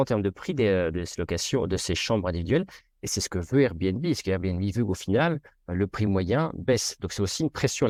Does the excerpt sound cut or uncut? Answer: uncut